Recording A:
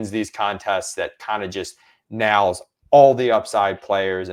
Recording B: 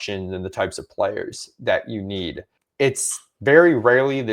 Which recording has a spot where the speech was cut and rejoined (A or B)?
B